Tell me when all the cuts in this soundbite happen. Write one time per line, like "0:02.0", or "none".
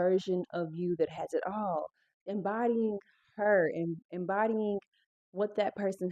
none